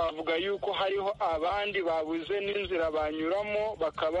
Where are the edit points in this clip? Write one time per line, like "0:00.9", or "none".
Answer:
none